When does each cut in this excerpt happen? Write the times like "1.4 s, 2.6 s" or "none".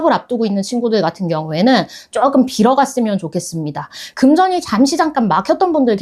4.0 s